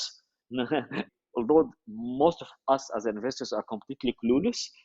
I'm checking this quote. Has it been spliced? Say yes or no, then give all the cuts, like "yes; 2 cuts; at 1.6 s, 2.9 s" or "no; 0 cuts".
yes; 1 cut; at 1.1 s